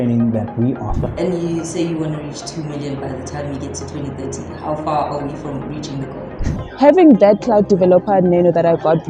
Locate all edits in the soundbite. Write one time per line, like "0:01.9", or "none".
0:01.0
0:06.2